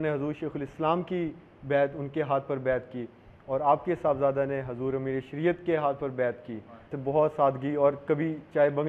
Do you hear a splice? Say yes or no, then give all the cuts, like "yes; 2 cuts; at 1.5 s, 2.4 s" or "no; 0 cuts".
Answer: yes; 1 cut; at 6.9 s